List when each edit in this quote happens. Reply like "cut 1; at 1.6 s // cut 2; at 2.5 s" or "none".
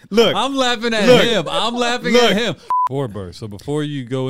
cut 1; at 2.7 s